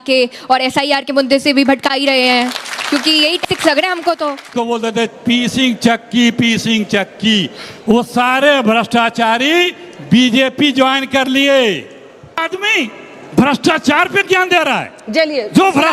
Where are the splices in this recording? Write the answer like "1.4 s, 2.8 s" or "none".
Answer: 4.5 s, 12.4 s